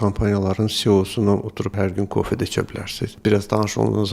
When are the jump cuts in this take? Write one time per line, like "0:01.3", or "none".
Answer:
0:03.1